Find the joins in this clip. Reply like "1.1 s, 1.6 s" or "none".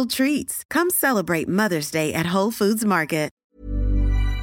3.4 s